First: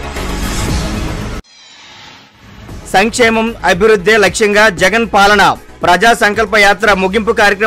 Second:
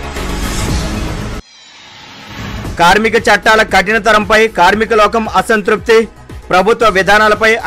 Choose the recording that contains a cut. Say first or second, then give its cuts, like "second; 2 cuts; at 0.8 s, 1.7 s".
second; 2 cuts; at 1.2 s, 2.5 s